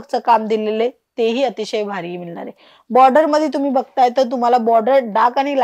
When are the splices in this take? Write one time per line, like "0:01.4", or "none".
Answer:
none